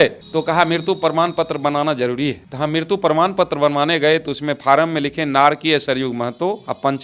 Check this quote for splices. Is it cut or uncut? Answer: uncut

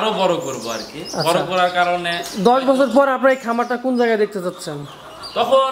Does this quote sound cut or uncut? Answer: uncut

